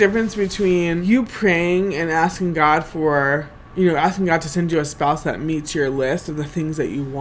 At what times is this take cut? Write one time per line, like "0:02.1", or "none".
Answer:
0:01.0